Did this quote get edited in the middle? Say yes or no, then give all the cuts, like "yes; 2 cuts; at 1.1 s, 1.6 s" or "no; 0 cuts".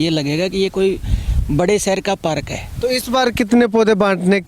yes; 1 cut; at 2.7 s